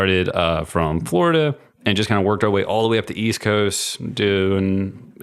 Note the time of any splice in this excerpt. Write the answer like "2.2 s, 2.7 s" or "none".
none